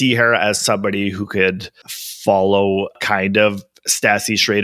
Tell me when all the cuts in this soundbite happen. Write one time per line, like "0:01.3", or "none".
0:03.0